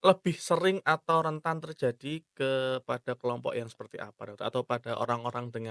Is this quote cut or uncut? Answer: uncut